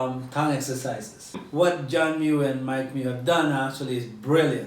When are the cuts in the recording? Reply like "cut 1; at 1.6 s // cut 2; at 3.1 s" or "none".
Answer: cut 1; at 1.4 s